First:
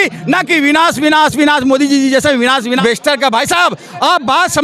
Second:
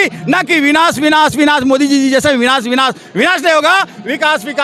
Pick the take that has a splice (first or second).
first